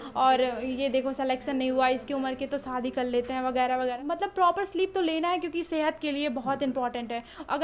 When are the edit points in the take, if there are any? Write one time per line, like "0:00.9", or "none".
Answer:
0:04.0